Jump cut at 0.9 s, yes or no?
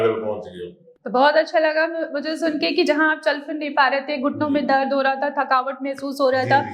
no